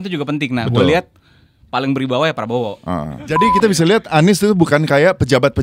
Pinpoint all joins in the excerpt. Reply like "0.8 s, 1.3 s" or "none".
3.3 s